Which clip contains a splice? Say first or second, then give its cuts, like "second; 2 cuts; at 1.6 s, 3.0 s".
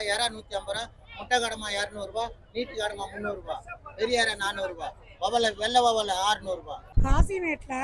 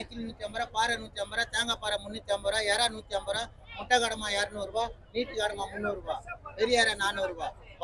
first; 1 cut; at 6.9 s